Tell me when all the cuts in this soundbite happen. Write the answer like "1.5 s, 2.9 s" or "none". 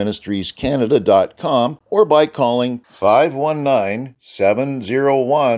1.8 s